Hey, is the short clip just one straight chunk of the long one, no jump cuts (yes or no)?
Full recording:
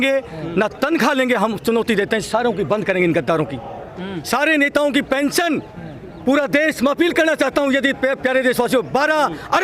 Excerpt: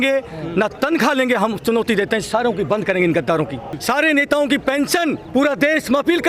no